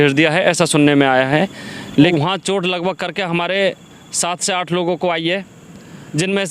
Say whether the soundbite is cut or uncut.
cut